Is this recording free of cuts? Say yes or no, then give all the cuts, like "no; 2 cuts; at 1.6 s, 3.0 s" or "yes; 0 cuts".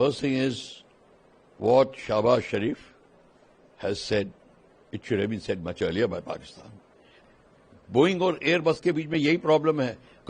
no; 1 cut; at 7.1 s